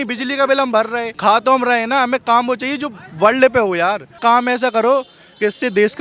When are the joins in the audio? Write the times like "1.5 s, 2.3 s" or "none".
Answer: 1.2 s, 4.1 s